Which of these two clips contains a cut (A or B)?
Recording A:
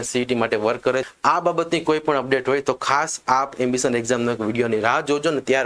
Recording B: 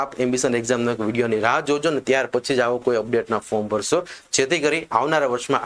A